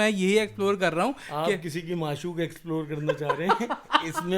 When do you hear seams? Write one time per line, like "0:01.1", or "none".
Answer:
none